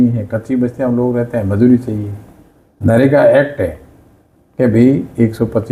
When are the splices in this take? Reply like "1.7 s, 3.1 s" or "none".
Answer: none